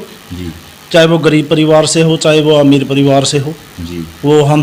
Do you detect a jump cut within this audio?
no; 0 cuts

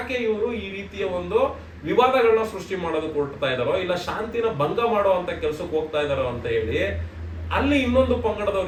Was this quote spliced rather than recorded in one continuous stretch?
no; 0 cuts

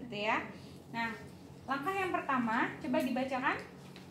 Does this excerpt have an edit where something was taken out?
no; 0 cuts

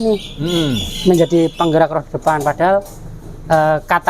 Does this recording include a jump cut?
no; 0 cuts

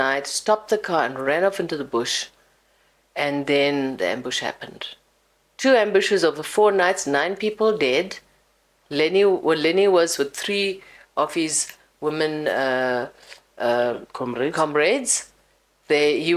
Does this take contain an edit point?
no; 0 cuts

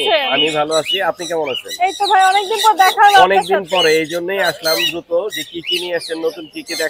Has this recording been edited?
no; 0 cuts

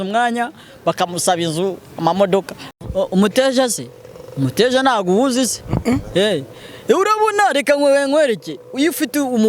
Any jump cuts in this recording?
yes; 1 cut; at 2.6 s

